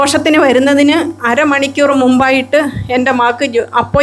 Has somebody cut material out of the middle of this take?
no; 0 cuts

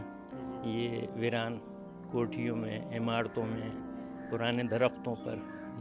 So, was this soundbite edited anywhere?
no; 0 cuts

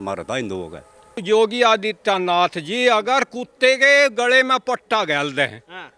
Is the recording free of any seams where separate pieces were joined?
no; 1 cut; at 1.1 s

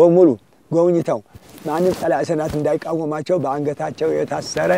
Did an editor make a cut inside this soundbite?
no; 0 cuts

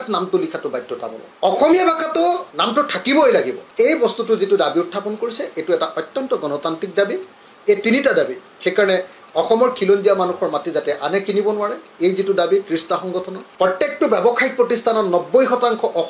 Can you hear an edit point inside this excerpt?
yes; 4 cuts; at 1.2 s, 2.5 s, 3.6 s, 13.4 s

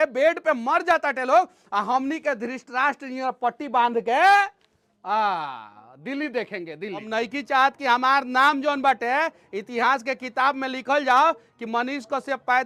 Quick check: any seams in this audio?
no; 0 cuts

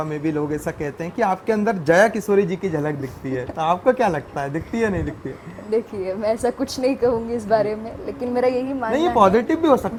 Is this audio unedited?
yes; 0 cuts

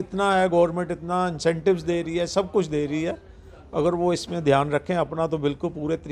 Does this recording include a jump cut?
no; 0 cuts

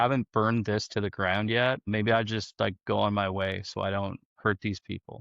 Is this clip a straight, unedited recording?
no; 1 cut; at 1.8 s

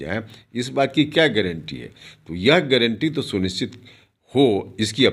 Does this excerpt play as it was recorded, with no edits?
yes; 0 cuts

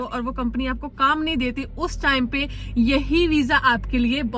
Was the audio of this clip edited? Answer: no; 0 cuts

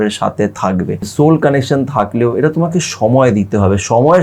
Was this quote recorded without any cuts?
no; 1 cut; at 1.1 s

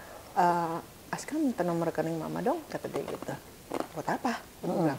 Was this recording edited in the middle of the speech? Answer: no; 0 cuts

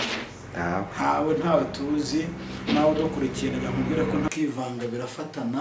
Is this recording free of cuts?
no; 1 cut; at 4.3 s

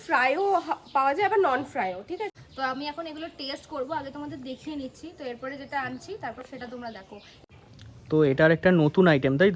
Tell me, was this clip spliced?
yes; 2 cuts; at 2.3 s, 7.3 s

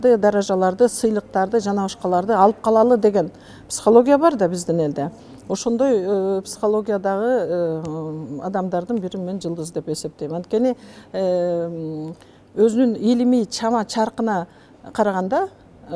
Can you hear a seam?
no; 0 cuts

